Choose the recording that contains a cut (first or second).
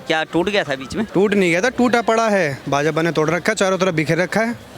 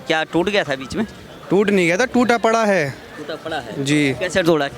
first